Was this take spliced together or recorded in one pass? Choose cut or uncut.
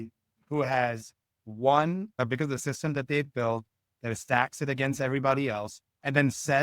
cut